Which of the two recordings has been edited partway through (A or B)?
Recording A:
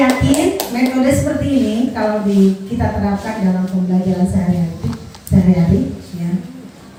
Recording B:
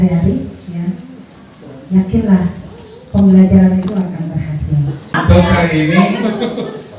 B